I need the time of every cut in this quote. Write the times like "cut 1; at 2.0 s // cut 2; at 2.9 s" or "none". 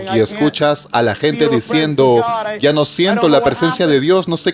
none